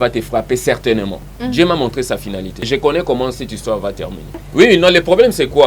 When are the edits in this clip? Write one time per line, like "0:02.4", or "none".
0:01.3
0:02.6
0:04.4